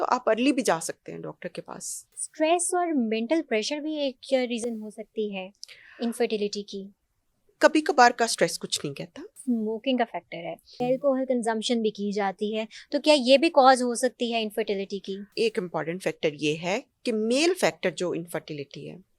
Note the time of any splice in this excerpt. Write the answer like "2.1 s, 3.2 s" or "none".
2.2 s, 9.4 s, 10.8 s, 15.3 s